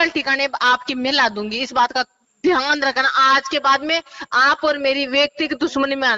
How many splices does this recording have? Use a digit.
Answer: 0